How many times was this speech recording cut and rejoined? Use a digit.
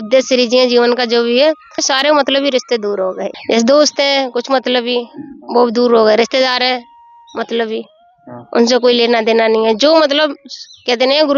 2